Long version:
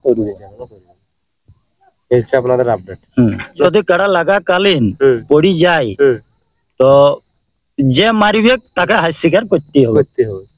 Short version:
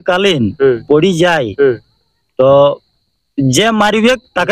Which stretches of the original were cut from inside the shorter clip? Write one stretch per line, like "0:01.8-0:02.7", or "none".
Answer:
none